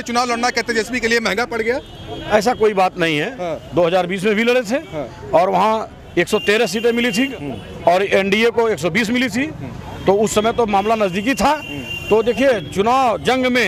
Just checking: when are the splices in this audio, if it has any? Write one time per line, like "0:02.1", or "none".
none